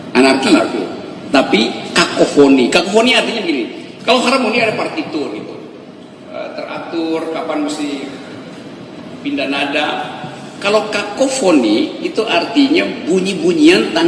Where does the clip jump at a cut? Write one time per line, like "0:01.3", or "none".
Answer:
none